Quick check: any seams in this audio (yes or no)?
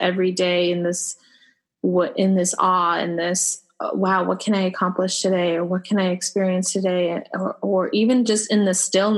no